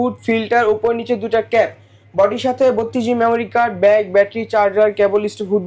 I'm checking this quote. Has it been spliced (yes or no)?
no